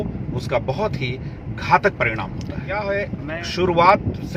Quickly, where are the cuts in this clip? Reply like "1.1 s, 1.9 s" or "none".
none